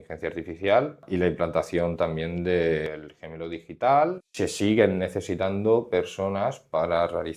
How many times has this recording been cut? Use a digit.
3